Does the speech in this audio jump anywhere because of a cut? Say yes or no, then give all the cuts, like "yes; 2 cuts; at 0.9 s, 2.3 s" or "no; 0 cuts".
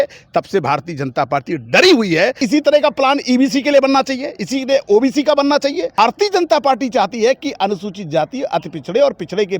yes; 2 cuts; at 2.4 s, 6.0 s